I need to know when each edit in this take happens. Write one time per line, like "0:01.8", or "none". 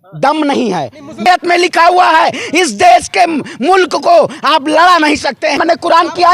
0:01.3
0:05.6